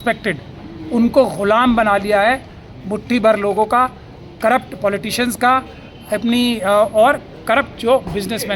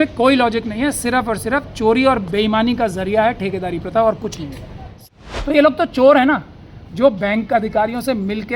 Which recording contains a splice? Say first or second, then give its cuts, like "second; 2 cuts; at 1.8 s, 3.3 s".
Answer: second; 1 cut; at 4.9 s